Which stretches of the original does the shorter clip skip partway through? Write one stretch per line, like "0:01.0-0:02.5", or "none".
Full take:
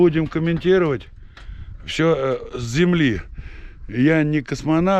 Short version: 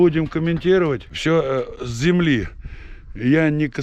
0:01.1-0:01.8